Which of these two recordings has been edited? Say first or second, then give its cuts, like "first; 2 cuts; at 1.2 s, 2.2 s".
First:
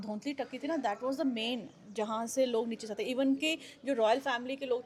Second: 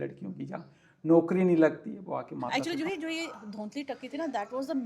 second; 1 cut; at 2.5 s